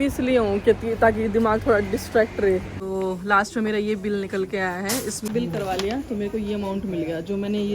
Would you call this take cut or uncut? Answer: cut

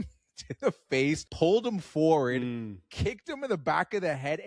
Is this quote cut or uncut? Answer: cut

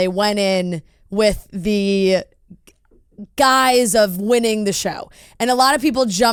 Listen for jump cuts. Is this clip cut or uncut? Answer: uncut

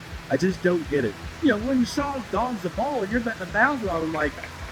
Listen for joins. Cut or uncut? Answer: cut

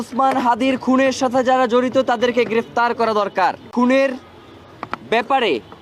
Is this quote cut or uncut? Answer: cut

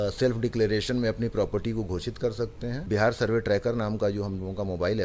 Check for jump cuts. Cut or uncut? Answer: cut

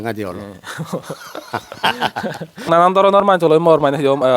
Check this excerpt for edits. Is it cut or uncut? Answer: cut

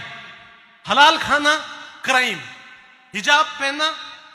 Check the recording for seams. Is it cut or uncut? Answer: uncut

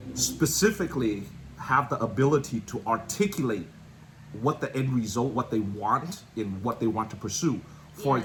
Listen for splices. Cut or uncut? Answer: uncut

